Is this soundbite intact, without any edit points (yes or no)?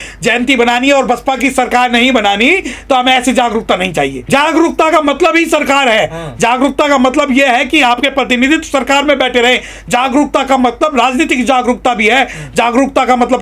no